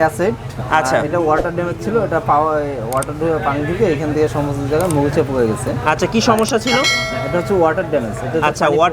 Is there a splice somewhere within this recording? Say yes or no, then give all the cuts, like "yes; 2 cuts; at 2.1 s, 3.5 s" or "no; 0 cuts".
no; 0 cuts